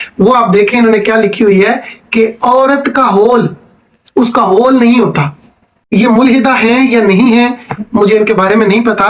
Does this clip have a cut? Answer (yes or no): yes